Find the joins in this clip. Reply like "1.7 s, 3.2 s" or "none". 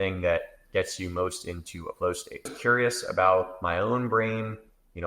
2.5 s